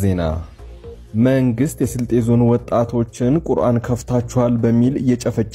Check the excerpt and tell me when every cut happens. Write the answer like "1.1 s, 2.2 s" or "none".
none